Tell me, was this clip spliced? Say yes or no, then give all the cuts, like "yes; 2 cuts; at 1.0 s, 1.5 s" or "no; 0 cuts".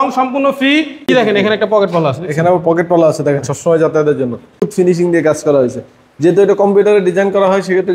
yes; 2 cuts; at 1.1 s, 4.7 s